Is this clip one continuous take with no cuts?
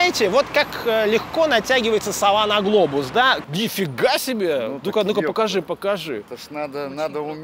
no; 1 cut; at 3.4 s

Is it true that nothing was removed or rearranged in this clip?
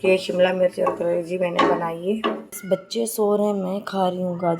no; 1 cut; at 2.6 s

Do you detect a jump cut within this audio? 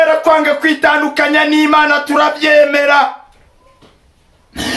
no; 0 cuts

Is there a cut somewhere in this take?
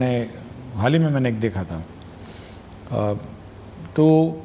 no; 0 cuts

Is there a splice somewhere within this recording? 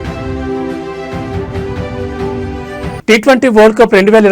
yes; 1 cut; at 2.9 s

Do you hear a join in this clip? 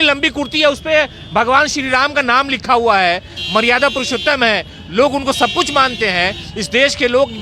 no; 0 cuts

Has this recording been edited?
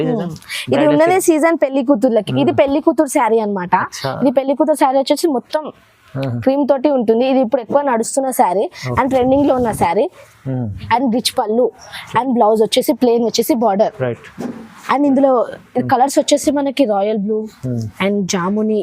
yes; 1 cut; at 10.8 s

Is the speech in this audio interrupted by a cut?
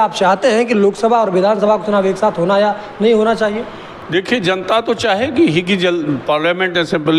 no; 0 cuts

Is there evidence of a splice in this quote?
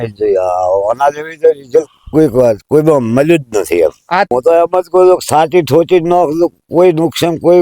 yes; 1 cut; at 4.3 s

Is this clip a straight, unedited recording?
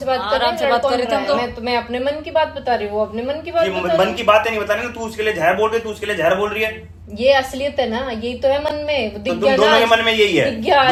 yes; 0 cuts

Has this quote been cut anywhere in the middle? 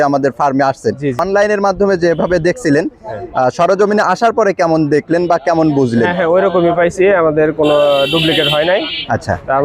yes; 1 cut; at 1.2 s

